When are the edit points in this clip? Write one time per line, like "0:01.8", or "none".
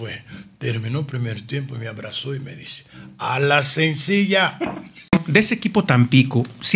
0:05.1